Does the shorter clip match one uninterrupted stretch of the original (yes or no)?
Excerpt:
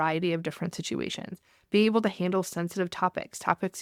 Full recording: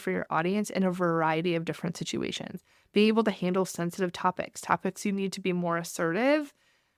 yes